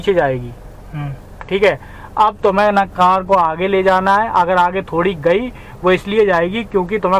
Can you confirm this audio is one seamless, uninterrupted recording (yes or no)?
yes